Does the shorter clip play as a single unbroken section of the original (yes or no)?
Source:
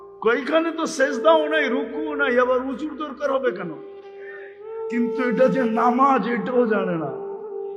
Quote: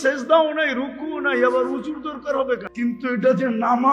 no